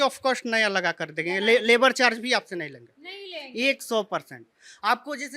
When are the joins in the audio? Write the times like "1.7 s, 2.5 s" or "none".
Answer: none